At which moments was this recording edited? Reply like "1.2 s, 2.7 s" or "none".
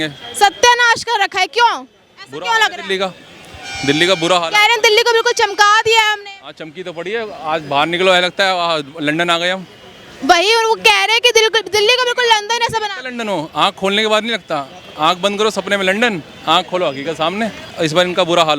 17.7 s